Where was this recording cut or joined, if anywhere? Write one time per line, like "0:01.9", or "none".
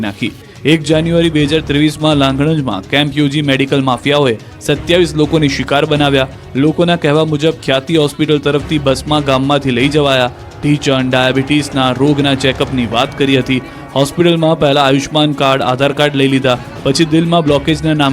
0:03.4